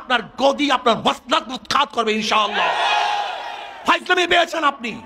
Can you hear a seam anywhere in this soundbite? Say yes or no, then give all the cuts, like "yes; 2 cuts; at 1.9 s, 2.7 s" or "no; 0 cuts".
no; 0 cuts